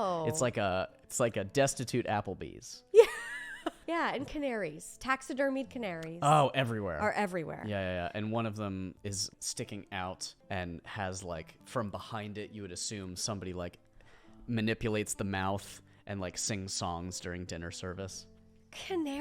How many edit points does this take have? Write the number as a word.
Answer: five